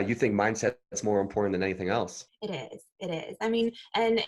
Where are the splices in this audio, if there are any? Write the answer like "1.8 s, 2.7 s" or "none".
2.2 s